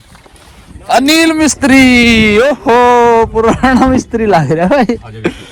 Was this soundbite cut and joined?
no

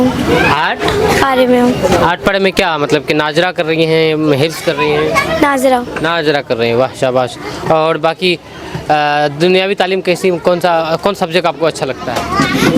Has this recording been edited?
no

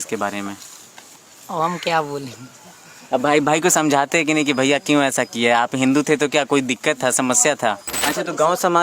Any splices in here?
yes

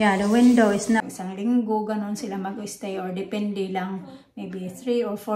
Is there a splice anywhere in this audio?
yes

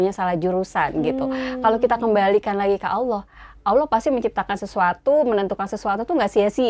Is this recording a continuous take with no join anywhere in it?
yes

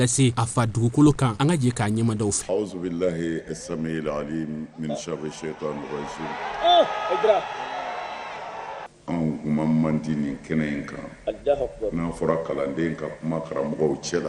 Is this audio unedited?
no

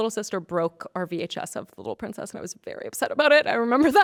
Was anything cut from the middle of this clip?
no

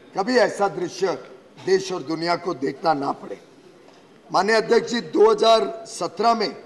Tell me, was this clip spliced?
no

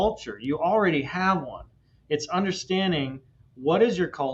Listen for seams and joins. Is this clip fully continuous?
yes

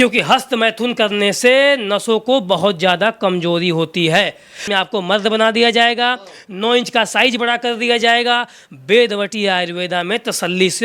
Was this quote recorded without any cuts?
no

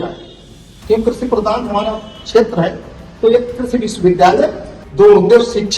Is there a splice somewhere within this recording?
yes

